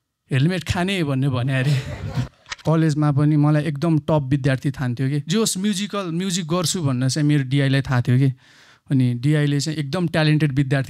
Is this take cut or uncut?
cut